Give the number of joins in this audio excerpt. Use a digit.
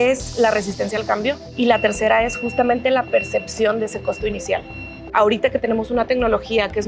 2